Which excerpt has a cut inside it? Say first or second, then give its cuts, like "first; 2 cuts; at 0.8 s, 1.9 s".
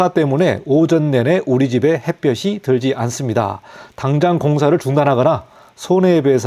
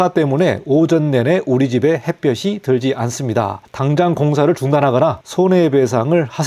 second; 2 cuts; at 3.7 s, 5.2 s